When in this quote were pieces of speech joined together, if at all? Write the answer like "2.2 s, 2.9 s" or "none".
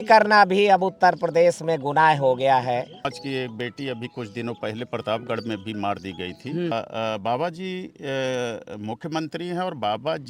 3.2 s, 6.7 s